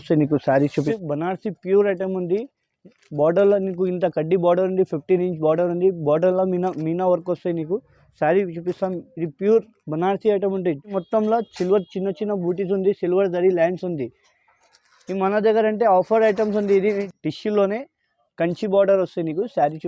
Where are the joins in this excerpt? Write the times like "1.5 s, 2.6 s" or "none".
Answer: 0.9 s, 11.0 s, 17.0 s